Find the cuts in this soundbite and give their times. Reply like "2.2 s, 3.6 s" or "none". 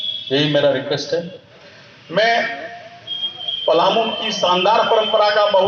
1.5 s